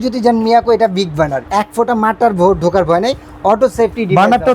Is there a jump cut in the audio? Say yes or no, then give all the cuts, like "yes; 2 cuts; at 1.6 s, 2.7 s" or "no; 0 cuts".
yes; 1 cut; at 1.4 s